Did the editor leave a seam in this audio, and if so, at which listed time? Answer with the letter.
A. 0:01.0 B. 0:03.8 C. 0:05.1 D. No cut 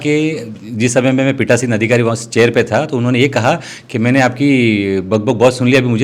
D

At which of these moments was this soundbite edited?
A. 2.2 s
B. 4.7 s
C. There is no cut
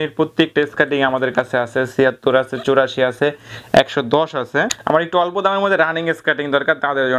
B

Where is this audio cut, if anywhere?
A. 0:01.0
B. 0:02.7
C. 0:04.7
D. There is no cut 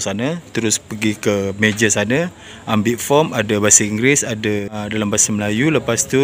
C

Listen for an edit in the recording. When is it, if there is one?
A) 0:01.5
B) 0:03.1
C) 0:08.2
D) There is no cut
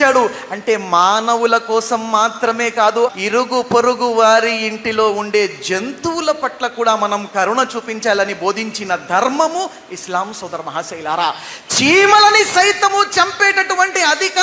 B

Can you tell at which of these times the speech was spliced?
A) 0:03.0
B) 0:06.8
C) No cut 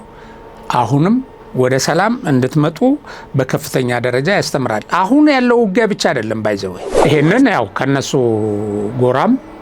B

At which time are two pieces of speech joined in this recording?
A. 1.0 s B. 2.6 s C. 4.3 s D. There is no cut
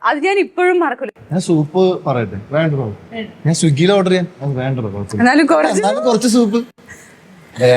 A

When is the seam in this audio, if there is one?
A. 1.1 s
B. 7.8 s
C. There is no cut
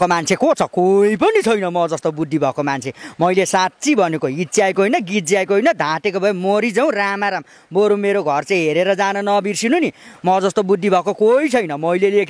C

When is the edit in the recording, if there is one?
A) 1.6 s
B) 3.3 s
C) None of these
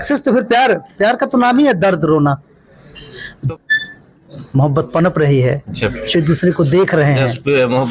B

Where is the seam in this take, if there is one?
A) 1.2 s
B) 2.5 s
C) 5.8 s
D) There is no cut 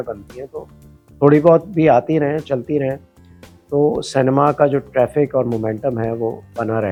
D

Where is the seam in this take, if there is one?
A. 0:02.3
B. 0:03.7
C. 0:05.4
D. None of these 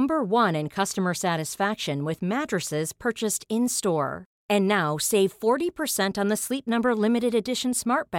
D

